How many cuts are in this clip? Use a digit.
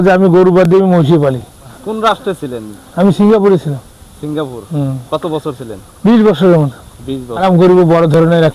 2